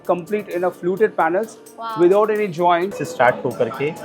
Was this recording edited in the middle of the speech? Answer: yes; 1 cut; at 3.0 s

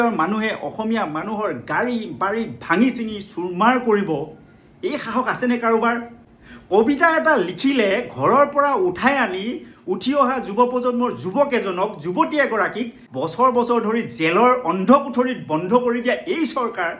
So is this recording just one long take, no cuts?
no; 1 cut; at 13.0 s

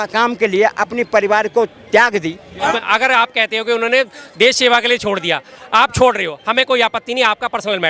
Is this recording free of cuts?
no; 1 cut; at 2.8 s

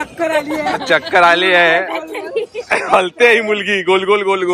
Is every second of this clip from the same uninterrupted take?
yes; 0 cuts

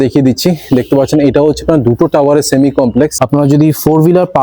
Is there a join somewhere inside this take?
yes; 1 cut; at 3.1 s

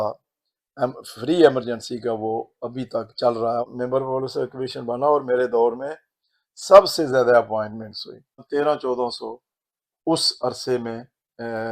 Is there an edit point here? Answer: yes; 1 cut; at 3.7 s

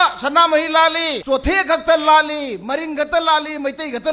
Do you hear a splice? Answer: yes; 1 cut; at 1.2 s

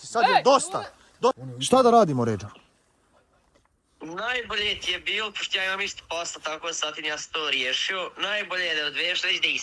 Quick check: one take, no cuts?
no; 1 cut; at 1.4 s

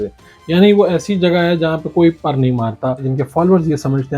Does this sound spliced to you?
yes; 1 cut; at 3.1 s

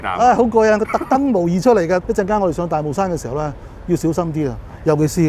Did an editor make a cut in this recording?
yes; 1 cut; at 2.0 s

